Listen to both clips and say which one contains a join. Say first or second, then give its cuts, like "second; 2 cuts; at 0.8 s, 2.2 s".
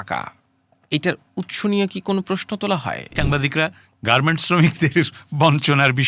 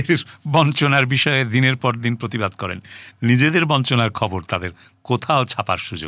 first; 1 cut; at 3.1 s